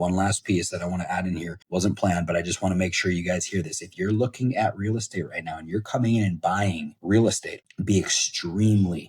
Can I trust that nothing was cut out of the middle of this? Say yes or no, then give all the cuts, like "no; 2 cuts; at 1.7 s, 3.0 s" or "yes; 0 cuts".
no; 1 cut; at 1.6 s